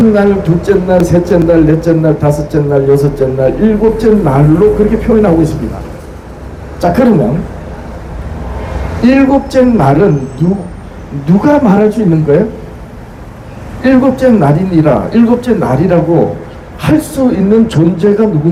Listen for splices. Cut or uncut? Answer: uncut